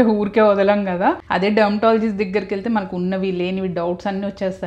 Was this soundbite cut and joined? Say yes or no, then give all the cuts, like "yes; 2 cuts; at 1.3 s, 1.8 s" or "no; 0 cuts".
yes; 1 cut; at 1.2 s